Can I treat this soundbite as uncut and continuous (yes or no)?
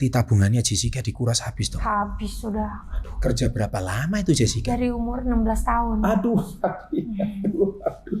yes